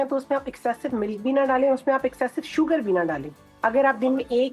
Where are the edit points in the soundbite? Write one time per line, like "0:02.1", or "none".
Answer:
none